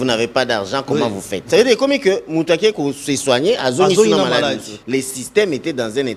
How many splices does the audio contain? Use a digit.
2